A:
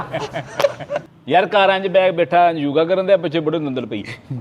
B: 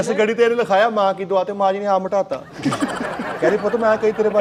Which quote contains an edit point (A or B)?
A